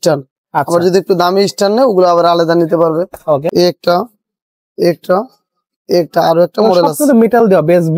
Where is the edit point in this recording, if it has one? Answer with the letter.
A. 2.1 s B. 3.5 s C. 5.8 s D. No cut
B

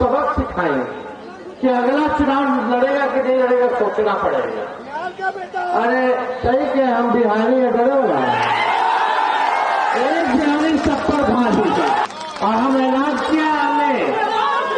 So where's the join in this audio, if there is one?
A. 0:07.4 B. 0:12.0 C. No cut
B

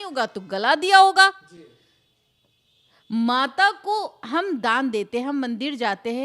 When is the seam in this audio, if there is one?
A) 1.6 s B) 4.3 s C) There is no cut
C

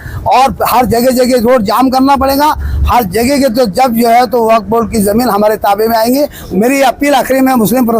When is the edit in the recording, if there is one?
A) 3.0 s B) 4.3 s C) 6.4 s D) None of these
C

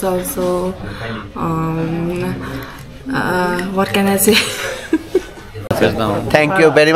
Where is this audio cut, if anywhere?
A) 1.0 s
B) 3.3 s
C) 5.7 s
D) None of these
C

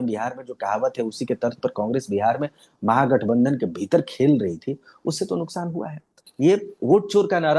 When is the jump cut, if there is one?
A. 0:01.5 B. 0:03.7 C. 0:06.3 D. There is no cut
C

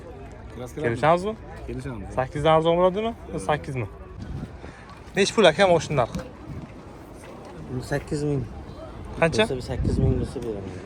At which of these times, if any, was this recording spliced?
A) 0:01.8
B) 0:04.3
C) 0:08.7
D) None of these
B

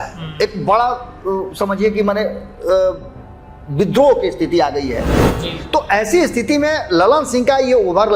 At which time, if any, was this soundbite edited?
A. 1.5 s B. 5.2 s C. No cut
B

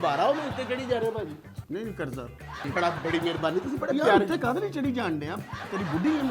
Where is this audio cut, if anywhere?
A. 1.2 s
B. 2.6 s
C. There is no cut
B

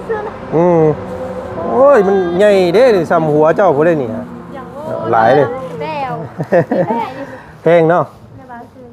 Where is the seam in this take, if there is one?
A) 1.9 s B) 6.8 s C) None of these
C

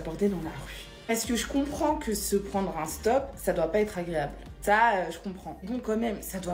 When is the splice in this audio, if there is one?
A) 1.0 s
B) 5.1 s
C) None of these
C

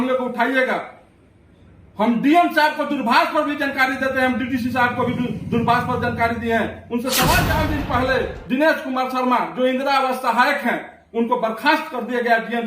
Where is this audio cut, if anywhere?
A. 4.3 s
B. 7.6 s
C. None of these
B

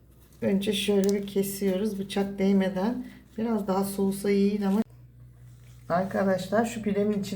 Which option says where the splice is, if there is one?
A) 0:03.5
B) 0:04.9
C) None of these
B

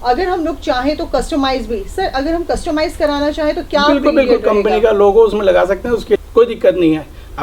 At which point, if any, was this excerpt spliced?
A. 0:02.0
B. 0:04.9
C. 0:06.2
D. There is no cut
C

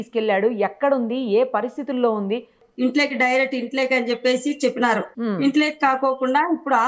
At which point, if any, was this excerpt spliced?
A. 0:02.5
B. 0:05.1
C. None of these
A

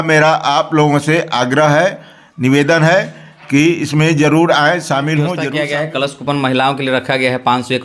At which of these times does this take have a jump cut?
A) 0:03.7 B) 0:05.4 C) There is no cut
B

